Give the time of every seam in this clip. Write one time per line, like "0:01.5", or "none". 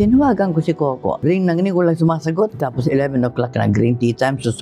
0:01.2